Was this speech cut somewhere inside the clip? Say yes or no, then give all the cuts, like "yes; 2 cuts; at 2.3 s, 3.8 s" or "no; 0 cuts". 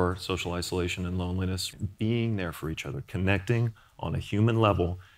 yes; 1 cut; at 1.7 s